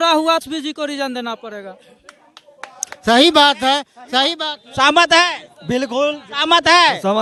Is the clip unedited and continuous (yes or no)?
yes